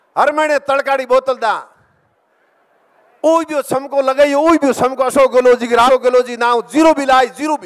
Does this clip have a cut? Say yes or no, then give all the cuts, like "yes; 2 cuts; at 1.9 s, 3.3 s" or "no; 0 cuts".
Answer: yes; 1 cut; at 5.9 s